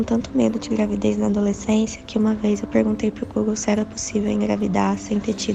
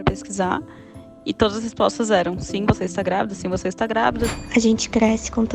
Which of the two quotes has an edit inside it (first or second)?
second